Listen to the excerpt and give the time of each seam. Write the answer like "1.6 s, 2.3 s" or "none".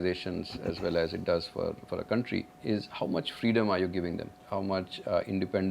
2.5 s, 4.4 s